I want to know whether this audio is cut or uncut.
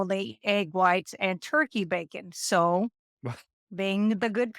uncut